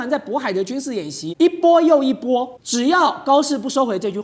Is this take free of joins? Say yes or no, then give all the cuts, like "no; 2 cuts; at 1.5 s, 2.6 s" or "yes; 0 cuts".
no; 2 cuts; at 1.2 s, 2.6 s